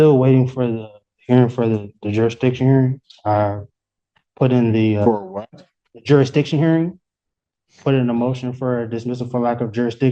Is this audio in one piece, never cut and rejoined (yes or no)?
yes